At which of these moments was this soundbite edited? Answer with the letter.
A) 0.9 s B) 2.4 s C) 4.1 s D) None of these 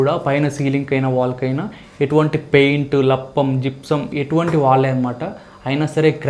C